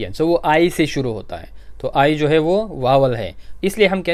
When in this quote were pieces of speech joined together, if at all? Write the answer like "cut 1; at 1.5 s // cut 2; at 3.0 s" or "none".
none